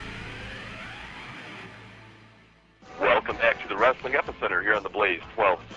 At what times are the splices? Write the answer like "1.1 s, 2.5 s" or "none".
2.3 s